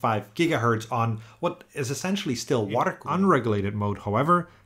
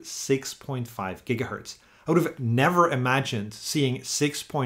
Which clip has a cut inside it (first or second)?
first